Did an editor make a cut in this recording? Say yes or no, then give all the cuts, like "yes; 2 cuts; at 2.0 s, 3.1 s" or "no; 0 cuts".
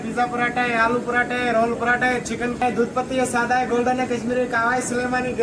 yes; 1 cut; at 2.6 s